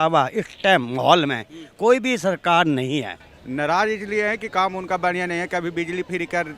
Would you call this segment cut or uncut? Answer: uncut